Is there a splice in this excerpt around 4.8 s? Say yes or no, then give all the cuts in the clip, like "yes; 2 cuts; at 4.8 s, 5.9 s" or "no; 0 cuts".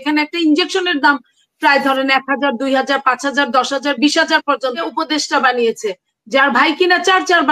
yes; 1 cut; at 4.8 s